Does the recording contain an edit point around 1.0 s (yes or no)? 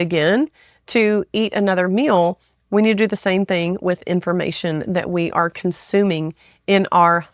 no